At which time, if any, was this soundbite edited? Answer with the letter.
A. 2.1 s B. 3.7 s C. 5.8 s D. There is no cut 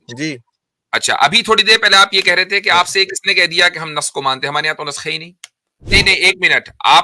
C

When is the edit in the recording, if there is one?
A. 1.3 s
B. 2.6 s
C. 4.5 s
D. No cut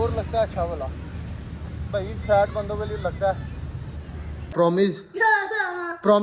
C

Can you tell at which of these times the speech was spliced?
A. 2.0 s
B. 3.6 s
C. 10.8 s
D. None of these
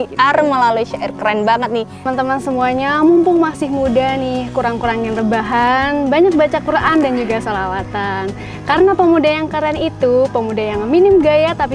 A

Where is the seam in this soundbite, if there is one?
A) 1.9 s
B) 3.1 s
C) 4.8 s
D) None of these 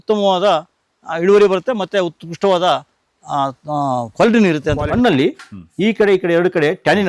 C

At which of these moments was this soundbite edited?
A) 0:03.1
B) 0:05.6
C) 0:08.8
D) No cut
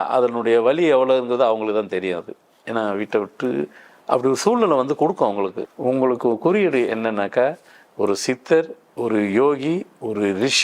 B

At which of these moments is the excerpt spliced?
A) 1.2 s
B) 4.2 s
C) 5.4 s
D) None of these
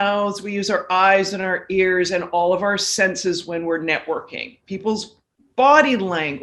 D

